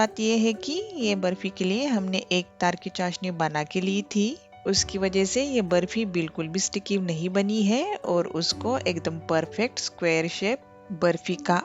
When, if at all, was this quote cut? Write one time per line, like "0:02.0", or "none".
none